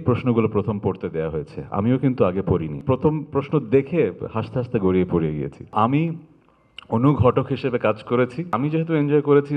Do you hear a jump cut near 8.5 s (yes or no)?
yes